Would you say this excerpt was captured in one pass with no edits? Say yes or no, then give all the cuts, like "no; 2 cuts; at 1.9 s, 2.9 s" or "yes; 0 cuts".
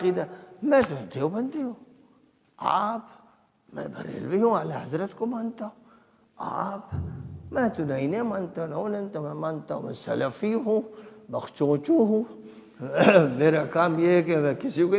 yes; 0 cuts